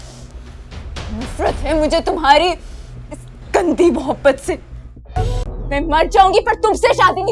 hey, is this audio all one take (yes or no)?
no